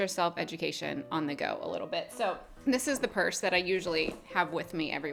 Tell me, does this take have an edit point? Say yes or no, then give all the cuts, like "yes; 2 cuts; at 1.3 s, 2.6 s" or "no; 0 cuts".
no; 0 cuts